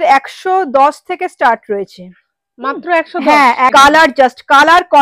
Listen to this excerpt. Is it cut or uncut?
cut